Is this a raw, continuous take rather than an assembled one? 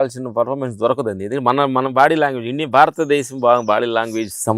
yes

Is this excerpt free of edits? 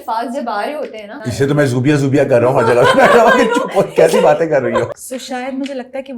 no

